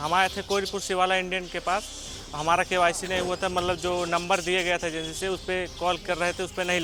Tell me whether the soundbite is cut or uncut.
uncut